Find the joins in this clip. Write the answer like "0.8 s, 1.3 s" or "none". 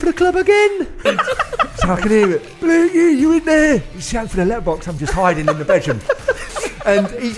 1.0 s, 6.5 s